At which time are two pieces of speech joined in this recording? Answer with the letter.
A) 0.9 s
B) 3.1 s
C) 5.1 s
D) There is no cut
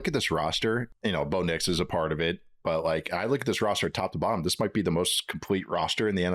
A